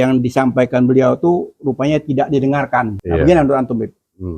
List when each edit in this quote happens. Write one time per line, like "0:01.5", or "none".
0:03.0

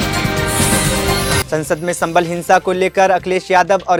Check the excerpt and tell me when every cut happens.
none

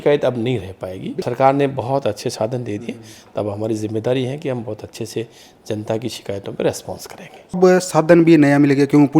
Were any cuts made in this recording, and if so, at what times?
none

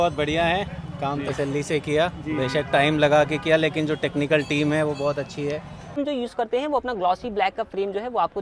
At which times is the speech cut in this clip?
0:05.9

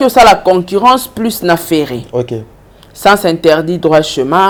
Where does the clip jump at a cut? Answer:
none

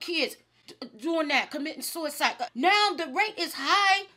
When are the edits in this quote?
0:02.4

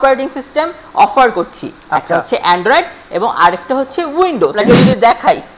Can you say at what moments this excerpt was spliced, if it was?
0:04.5

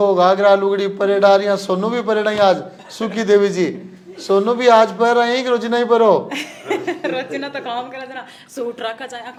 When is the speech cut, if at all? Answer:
none

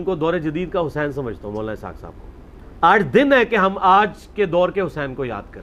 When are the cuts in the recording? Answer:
none

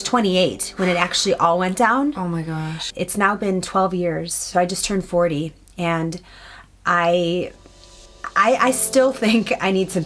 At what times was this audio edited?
0:02.8

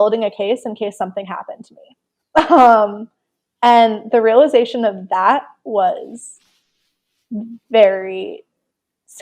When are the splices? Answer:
none

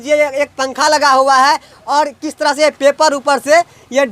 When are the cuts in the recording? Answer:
none

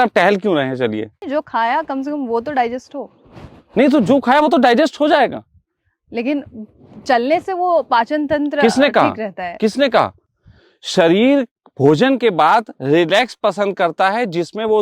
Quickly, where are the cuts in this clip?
0:01.2

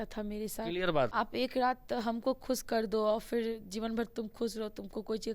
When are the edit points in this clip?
0:01.1

